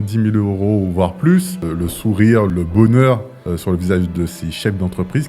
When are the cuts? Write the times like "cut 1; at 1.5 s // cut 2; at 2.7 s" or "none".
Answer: cut 1; at 1.6 s // cut 2; at 2.5 s // cut 3; at 3.3 s